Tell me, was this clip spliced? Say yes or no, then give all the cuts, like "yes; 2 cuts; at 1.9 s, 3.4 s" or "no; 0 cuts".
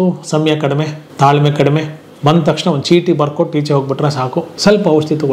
yes; 2 cuts; at 1.0 s, 4.5 s